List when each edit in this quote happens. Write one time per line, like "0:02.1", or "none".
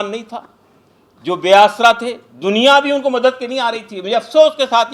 none